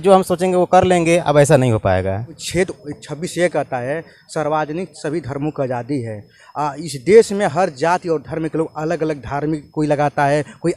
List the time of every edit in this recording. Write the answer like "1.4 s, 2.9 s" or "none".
2.4 s